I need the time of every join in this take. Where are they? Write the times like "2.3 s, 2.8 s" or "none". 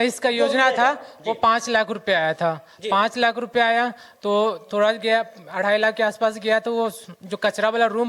none